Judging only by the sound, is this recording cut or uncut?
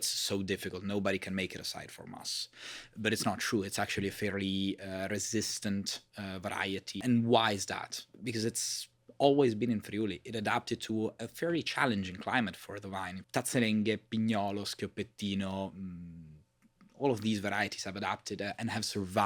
cut